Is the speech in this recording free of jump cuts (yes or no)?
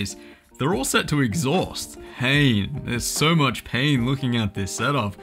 no